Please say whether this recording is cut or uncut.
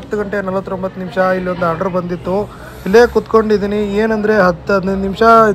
uncut